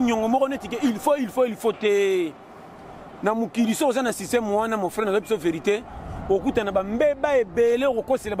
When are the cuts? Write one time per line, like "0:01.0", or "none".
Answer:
none